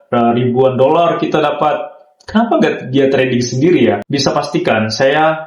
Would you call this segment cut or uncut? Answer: cut